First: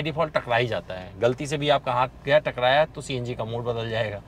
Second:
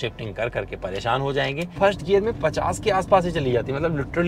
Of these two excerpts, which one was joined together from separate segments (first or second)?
second